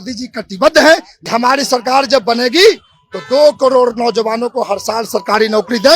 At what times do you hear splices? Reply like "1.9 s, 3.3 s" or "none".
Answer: 1.2 s